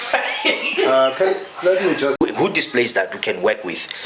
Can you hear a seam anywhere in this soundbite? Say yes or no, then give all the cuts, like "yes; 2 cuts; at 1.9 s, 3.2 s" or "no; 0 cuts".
yes; 1 cut; at 2.2 s